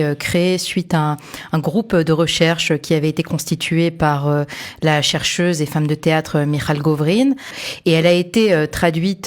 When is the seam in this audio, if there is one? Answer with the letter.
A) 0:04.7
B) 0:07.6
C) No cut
B